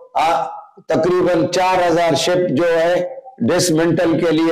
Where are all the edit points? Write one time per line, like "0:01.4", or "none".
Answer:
none